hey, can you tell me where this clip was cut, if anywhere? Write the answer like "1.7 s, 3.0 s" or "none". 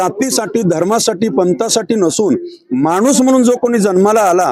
none